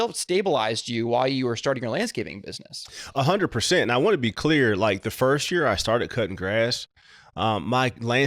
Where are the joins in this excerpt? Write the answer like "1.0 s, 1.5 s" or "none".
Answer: none

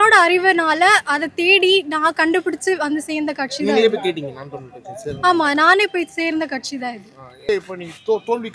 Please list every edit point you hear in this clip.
7.5 s

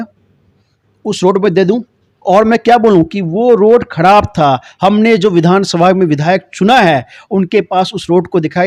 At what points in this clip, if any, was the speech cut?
none

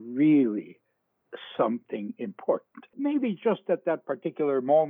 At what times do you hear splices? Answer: 2.9 s

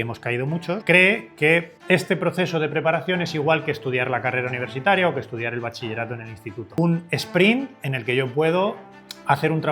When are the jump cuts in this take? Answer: 0.8 s, 1.7 s, 6.8 s

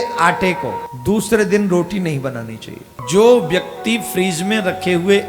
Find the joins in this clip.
0.9 s, 2.9 s

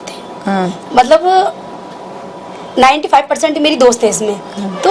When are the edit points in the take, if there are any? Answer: none

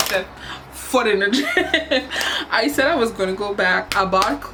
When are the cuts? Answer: none

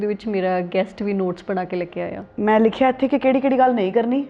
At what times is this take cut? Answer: 2.2 s

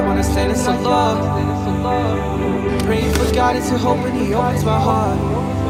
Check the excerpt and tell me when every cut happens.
none

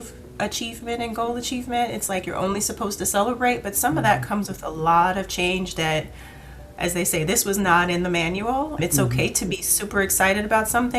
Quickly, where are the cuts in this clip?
8.8 s

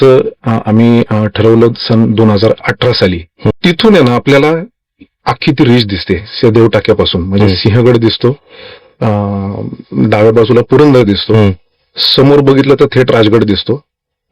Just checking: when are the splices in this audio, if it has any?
3.5 s

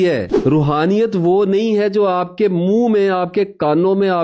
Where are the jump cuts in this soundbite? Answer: none

